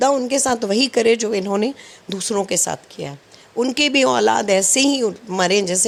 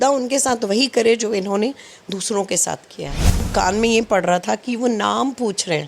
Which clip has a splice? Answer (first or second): second